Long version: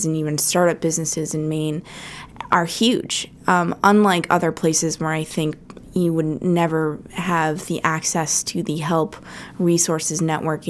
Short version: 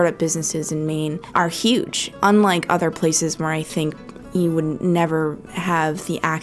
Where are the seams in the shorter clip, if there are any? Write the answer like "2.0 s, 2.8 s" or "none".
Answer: 1.2 s, 2.1 s